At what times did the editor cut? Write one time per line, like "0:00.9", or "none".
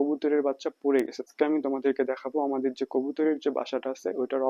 0:01.3